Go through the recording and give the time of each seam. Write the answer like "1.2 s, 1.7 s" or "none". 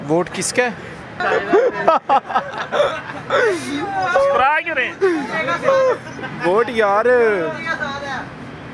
1.2 s